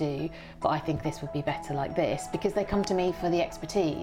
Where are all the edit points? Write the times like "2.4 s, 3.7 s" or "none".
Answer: none